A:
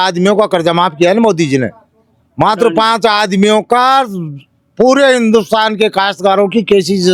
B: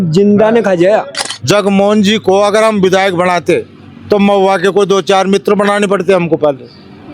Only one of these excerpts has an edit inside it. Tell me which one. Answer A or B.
B